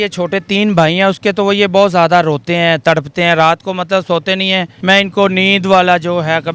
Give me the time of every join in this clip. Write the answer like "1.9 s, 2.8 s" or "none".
4.7 s